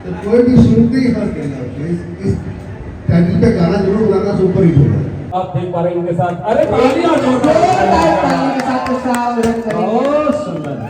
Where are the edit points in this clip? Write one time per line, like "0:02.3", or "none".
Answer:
0:05.2